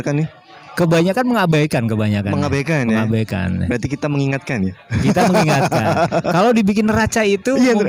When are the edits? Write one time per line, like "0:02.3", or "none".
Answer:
none